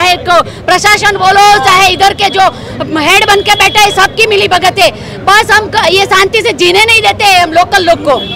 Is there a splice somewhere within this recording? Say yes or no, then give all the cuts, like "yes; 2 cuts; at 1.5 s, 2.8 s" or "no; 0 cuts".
no; 0 cuts